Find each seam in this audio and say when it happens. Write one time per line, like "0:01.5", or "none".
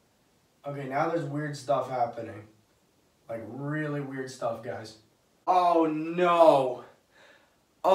0:05.5